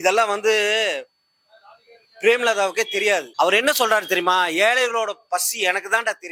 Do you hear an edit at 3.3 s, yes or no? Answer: yes